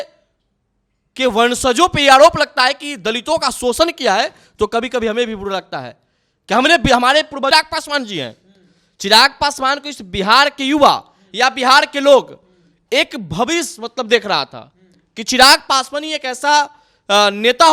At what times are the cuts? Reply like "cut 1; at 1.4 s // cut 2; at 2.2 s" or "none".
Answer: cut 1; at 7.5 s